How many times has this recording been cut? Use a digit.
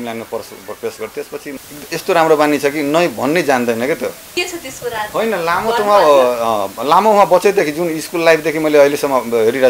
2